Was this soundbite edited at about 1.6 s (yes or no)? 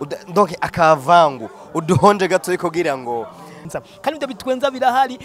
no